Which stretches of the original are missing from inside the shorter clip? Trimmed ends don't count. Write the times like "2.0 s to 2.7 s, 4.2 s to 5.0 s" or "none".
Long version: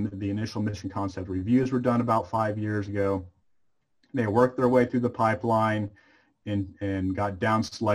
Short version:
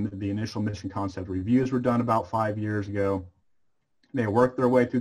none